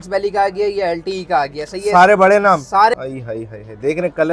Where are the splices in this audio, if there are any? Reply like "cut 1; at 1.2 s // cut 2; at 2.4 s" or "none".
cut 1; at 2.9 s